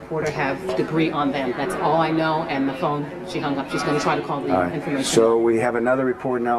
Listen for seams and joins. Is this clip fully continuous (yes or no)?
yes